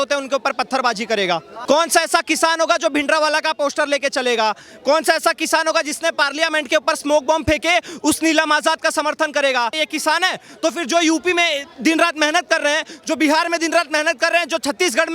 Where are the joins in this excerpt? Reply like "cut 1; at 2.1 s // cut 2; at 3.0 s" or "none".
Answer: cut 1; at 1.5 s // cut 2; at 9.8 s